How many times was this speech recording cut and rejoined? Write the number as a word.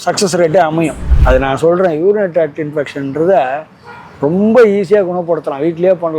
one